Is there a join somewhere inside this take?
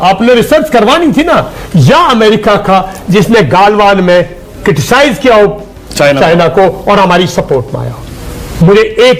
no; 0 cuts

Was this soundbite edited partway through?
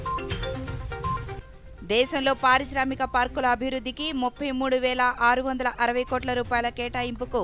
yes; 1 cut; at 1.7 s

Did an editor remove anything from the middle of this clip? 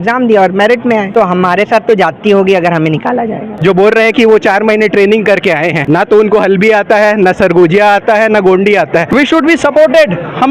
yes; 4 cuts; at 1.1 s, 3.5 s, 5.8 s, 9.1 s

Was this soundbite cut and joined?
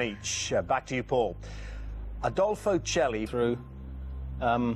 no; 0 cuts

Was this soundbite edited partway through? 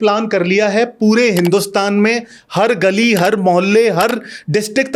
no; 0 cuts

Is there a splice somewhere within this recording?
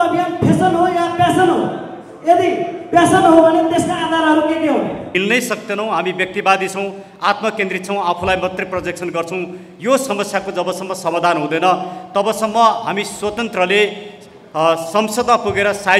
yes; 1 cut; at 5.1 s

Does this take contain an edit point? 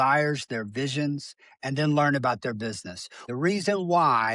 yes; 1 cut; at 3.2 s

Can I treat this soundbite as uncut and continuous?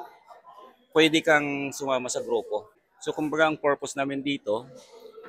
no; 1 cut; at 2.9 s

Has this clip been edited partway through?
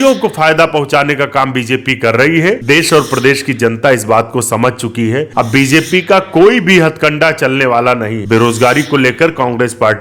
yes; 3 cuts; at 2.6 s, 5.3 s, 8.2 s

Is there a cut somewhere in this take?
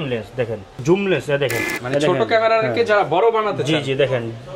yes; 2 cuts; at 0.8 s, 1.7 s

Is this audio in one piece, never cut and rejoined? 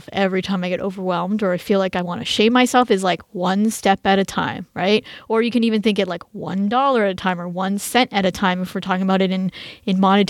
yes; 0 cuts

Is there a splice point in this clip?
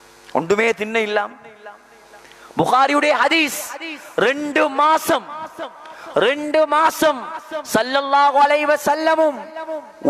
no; 0 cuts

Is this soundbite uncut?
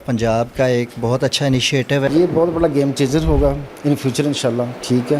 no; 1 cut; at 2.1 s

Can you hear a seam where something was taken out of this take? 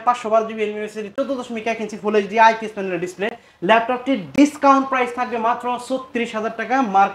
no; 0 cuts

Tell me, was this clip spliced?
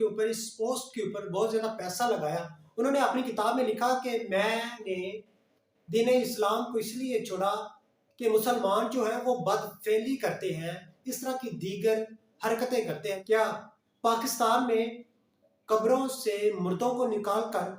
yes; 2 cuts; at 2.6 s, 13.2 s

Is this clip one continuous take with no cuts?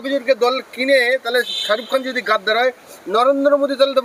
yes; 0 cuts

